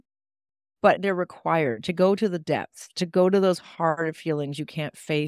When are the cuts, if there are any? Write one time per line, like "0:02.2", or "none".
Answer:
0:01.0

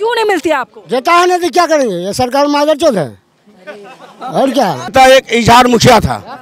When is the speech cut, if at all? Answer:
0:04.9

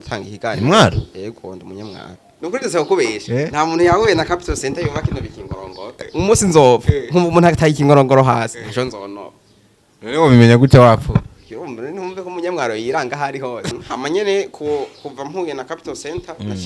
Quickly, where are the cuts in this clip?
0:02.4
0:05.9
0:13.7

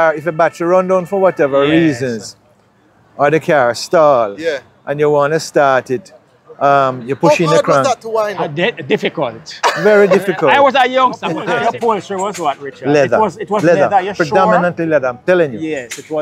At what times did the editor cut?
0:11.4

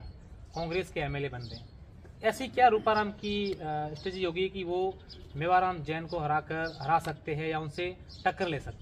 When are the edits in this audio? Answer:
none

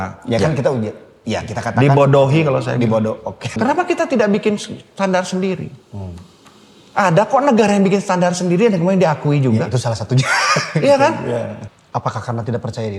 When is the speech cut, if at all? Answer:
0:03.5
0:11.6

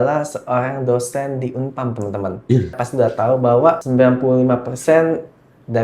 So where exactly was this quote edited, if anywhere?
0:02.8
0:03.8

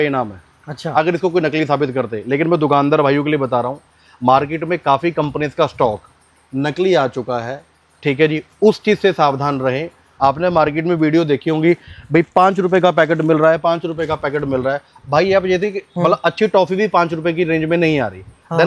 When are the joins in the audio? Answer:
0:10.0

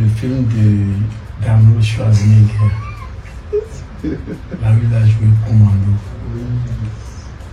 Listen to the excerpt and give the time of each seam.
none

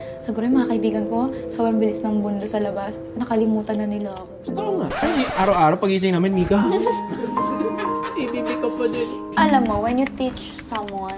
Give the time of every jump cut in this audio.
0:09.4

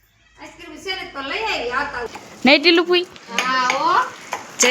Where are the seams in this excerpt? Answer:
0:02.1

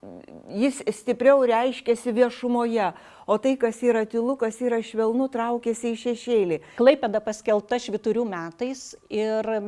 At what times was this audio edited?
0:06.7

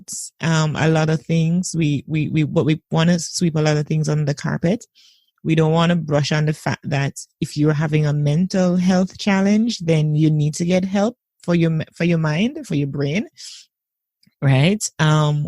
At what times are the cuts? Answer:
none

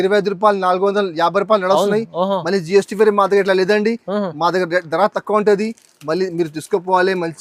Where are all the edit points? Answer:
none

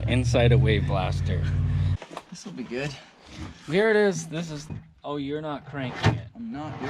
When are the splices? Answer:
0:01.9
0:04.7

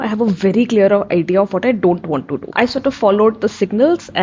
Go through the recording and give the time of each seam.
0:02.5

